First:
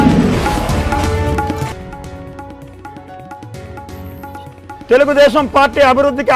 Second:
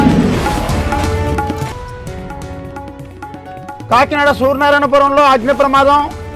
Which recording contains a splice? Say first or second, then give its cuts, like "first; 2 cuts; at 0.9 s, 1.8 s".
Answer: first; 3 cuts; at 1.7 s, 4.0 s, 4.8 s